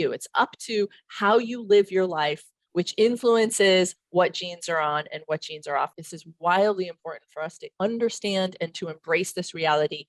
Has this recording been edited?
no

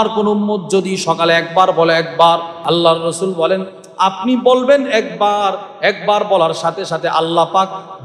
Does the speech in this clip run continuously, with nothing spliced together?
no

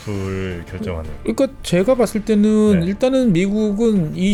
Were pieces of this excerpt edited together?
no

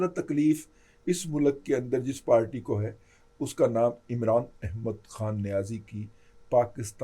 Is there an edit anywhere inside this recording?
no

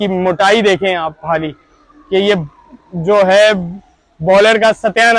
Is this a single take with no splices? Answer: yes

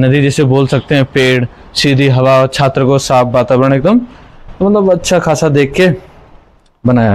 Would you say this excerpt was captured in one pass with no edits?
yes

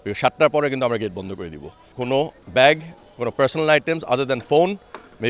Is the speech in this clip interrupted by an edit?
yes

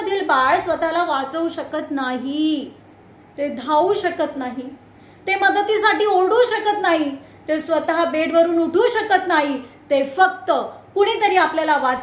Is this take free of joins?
yes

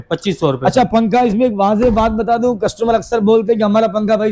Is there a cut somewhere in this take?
no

